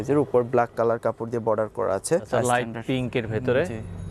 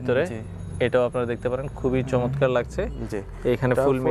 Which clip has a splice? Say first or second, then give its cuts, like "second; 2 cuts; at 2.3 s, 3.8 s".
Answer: first; 1 cut; at 2.3 s